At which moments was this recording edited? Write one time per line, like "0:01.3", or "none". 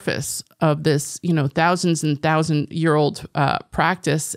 none